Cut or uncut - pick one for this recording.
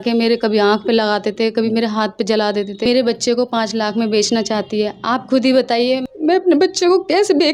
cut